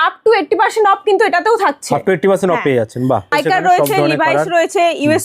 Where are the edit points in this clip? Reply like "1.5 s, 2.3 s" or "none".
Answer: 3.3 s